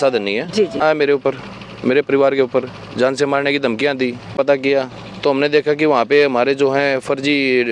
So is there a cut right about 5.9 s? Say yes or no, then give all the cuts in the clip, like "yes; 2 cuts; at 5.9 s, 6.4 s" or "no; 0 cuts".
no; 2 cuts; at 1.2 s, 4.4 s